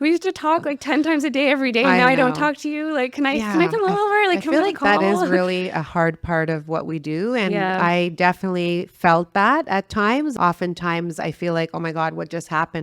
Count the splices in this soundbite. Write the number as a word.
one